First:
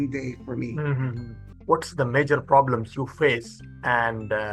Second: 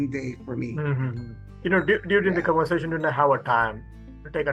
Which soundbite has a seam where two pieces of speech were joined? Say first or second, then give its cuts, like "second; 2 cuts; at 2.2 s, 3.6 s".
first; 1 cut; at 1.4 s